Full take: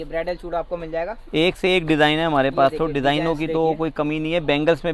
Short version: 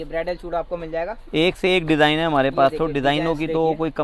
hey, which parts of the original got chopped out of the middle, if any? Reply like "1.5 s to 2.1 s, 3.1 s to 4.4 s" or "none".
none